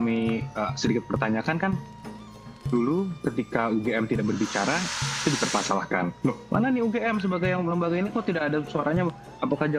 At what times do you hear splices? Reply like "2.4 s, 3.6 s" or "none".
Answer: none